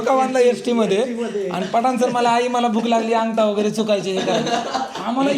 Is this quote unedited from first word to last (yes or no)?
yes